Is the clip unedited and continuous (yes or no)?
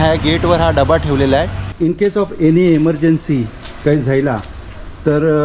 no